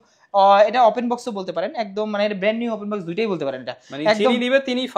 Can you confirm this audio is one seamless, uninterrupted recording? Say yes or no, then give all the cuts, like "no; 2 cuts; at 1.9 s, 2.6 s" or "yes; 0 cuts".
yes; 0 cuts